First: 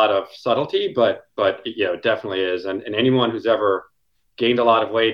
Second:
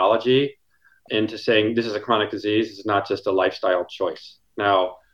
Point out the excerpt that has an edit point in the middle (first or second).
second